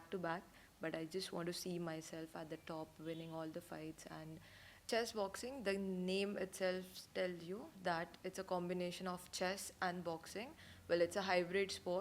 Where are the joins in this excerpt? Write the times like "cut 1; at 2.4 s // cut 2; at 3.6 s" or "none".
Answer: cut 1; at 4.8 s